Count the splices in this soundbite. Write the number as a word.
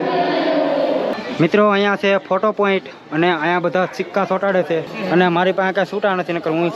two